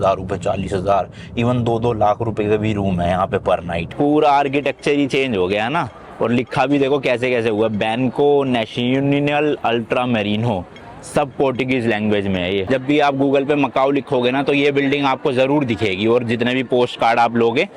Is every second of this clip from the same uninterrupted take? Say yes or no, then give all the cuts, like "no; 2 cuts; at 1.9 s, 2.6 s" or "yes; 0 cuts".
no; 2 cuts; at 3.8 s, 12.6 s